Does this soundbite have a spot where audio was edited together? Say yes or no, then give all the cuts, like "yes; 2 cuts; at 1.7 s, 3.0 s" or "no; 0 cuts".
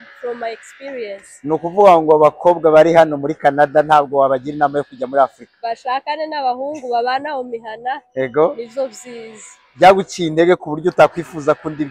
no; 0 cuts